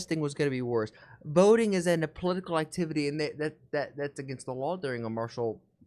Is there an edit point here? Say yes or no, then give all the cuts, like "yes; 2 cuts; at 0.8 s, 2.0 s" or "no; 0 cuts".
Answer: no; 0 cuts